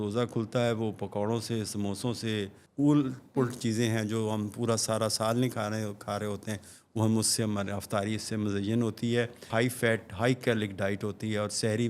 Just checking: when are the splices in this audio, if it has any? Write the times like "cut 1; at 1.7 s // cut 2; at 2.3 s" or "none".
cut 1; at 2.6 s // cut 2; at 9.5 s